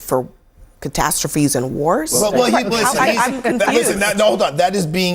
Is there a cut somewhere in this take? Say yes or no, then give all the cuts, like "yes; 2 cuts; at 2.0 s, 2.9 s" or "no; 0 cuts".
no; 0 cuts